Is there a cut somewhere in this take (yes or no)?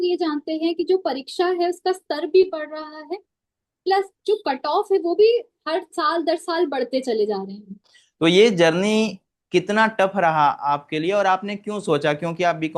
yes